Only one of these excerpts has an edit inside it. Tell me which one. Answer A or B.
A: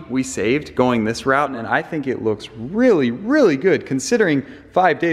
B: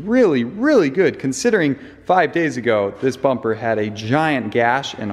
A